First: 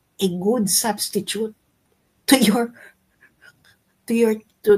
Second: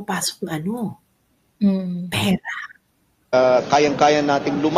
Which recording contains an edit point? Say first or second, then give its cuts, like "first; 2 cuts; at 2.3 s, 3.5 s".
second; 1 cut; at 3.3 s